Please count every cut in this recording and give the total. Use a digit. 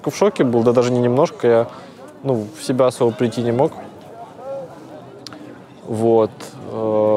0